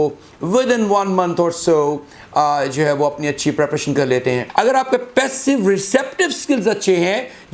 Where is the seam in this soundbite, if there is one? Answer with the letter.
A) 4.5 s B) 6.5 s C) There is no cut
A